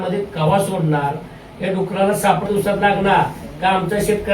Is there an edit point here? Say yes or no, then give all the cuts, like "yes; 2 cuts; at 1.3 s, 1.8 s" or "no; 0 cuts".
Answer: yes; 1 cut; at 2.5 s